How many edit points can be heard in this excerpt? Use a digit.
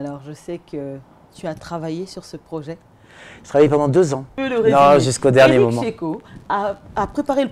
1